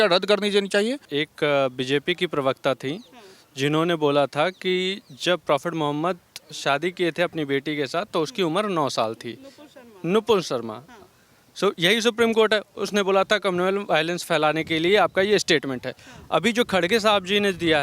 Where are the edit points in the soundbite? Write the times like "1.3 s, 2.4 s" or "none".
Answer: 1.0 s